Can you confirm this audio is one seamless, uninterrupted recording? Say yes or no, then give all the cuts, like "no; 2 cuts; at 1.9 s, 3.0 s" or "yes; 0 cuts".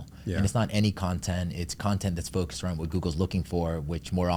yes; 0 cuts